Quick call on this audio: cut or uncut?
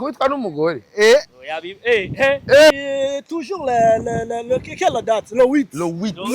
cut